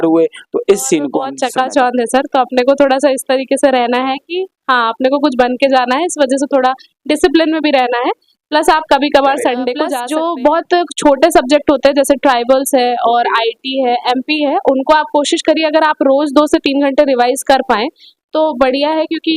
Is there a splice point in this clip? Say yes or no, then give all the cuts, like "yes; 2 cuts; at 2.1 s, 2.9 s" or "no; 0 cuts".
yes; 2 cuts; at 1.4 s, 10.0 s